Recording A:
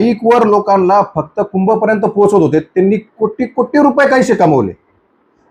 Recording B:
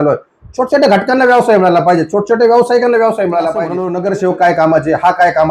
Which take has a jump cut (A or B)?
B